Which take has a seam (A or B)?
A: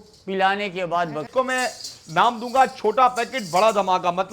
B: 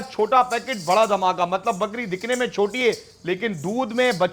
A